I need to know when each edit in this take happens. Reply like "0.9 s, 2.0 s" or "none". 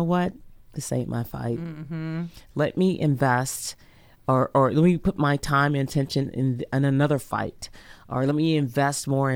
none

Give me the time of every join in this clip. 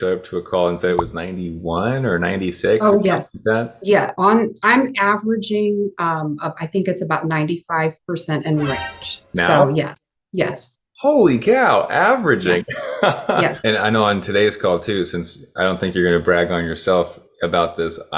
13.6 s

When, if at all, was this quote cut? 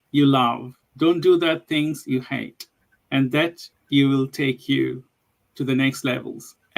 5.3 s

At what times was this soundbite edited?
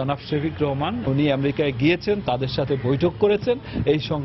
1.0 s

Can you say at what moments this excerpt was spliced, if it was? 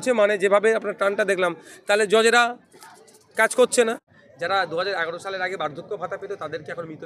4.1 s

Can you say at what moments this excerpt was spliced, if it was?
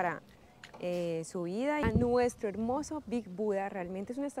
1.8 s

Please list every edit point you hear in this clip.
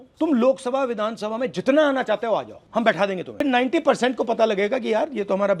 3.4 s

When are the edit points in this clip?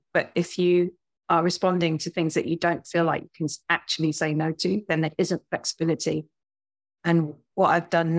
none

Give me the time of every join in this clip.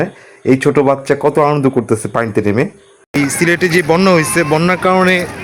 3.2 s

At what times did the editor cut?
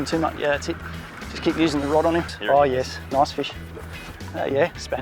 2.3 s

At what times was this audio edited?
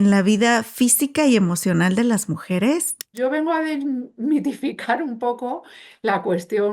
3.1 s

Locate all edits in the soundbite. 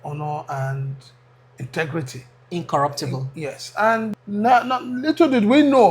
4.2 s

